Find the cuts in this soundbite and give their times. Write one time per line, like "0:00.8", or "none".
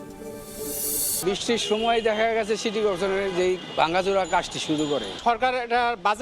0:01.1
0:05.1